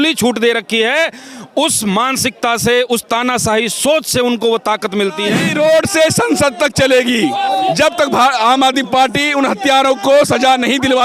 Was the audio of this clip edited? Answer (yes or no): yes